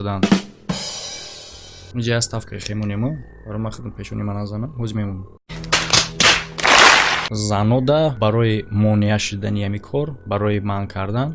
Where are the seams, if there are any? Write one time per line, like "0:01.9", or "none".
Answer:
0:07.2